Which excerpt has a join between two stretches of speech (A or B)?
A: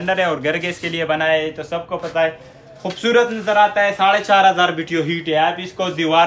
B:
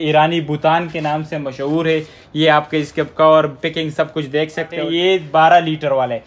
B